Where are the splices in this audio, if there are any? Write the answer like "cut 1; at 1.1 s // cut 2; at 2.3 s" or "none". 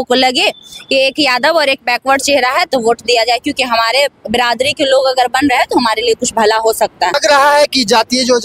cut 1; at 7.2 s